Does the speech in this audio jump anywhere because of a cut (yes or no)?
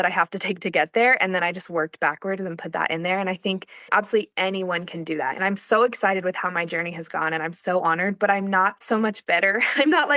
yes